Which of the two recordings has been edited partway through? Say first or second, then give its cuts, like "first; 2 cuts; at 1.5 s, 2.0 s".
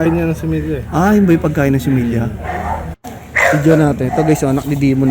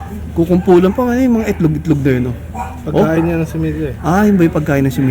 first; 1 cut; at 3.2 s